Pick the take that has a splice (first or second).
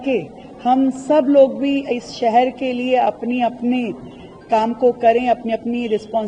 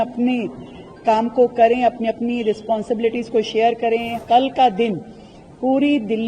second